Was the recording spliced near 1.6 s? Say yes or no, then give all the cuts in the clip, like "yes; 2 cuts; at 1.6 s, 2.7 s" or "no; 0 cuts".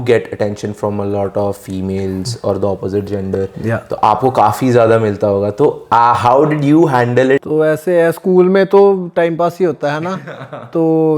no; 2 cuts; at 5.8 s, 7.4 s